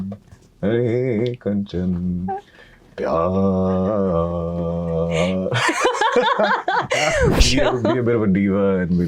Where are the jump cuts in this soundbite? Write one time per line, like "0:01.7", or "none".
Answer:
0:07.4